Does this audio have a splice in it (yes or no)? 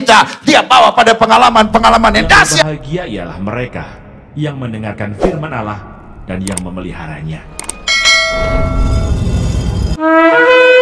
yes